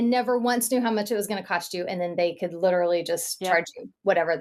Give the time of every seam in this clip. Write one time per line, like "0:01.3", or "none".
none

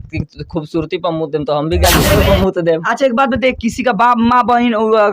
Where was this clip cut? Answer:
0:02.0

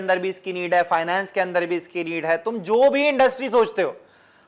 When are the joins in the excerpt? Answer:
none

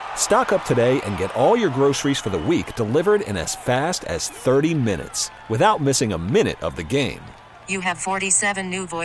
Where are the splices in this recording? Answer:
none

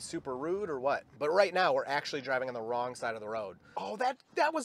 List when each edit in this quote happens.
0:01.1
0:03.6

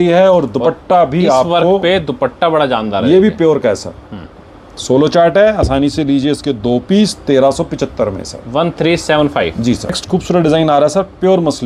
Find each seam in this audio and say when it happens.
none

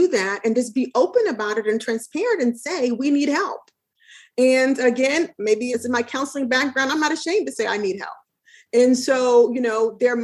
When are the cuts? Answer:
0:05.7

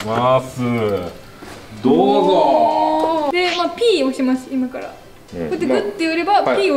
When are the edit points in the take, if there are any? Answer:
0:03.3

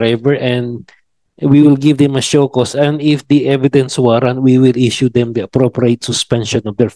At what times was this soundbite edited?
none

